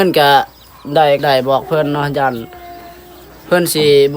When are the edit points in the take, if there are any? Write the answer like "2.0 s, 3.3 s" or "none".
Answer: 1.2 s